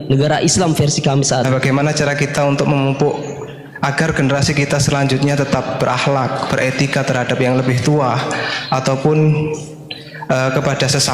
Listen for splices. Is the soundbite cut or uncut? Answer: cut